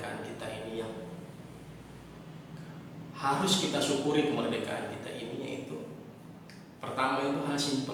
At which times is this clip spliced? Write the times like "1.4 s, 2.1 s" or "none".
none